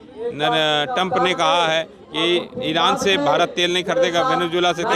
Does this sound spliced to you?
no; 0 cuts

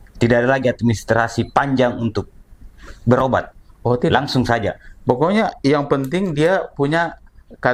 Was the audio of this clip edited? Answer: no; 0 cuts

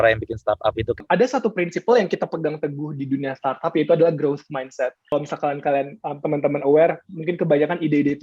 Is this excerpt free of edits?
no; 2 cuts; at 1.0 s, 5.1 s

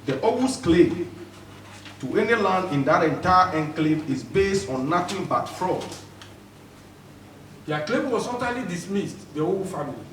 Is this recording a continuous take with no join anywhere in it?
no; 1 cut; at 6.4 s

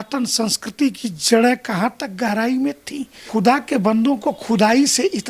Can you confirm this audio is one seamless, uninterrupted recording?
no; 1 cut; at 3.2 s

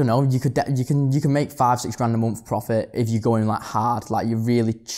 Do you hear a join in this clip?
no; 0 cuts

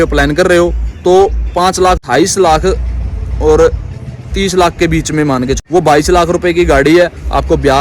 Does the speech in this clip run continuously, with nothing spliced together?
no; 2 cuts; at 2.0 s, 5.6 s

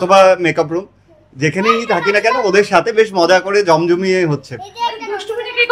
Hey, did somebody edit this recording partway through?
no; 0 cuts

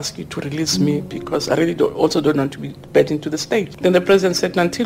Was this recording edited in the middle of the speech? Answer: yes; 1 cut; at 3.7 s

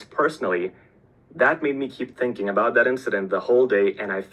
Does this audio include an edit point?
no; 0 cuts

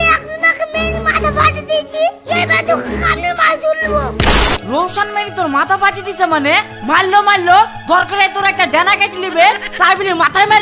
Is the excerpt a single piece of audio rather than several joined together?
no; 1 cut; at 4.6 s

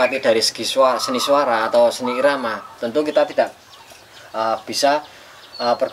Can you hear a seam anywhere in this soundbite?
no; 0 cuts

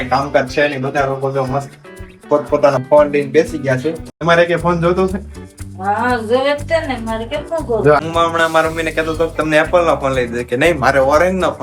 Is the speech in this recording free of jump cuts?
no; 2 cuts; at 4.2 s, 8.0 s

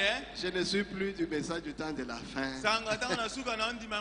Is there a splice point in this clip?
no; 0 cuts

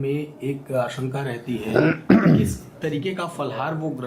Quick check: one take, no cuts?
yes; 0 cuts

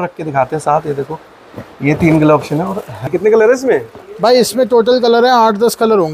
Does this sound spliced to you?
yes; 1 cut; at 3.1 s

